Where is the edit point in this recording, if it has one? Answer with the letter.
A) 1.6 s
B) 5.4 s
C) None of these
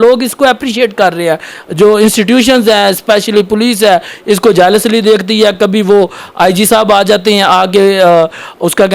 A